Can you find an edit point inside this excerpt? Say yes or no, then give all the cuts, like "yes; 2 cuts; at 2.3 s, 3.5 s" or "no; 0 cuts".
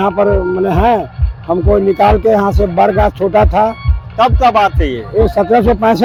no; 0 cuts